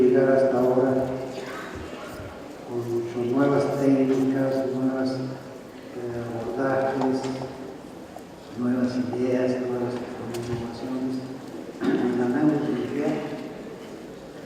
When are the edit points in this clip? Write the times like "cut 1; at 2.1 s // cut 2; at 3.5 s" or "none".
none

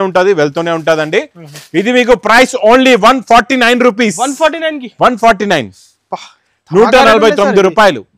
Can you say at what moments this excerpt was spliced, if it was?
none

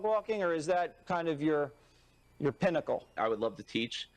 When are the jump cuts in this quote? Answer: cut 1; at 3.1 s

